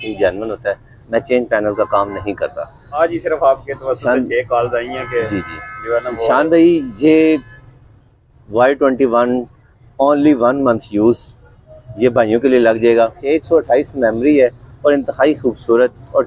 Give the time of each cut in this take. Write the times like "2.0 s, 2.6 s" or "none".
2.9 s, 13.2 s